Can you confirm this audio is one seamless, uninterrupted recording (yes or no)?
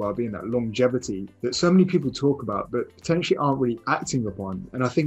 no